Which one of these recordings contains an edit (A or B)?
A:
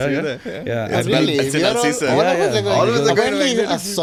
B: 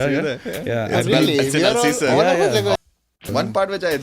B